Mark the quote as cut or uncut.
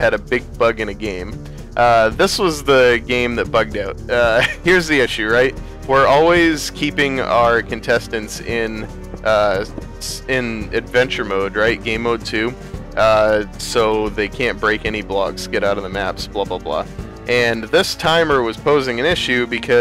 uncut